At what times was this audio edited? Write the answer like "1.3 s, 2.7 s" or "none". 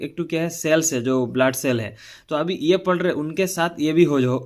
none